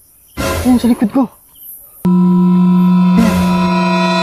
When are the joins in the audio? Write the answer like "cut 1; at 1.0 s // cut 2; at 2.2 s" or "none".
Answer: cut 1; at 2.0 s